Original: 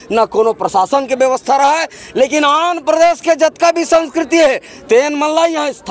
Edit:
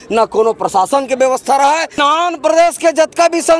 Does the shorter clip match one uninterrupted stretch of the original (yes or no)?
no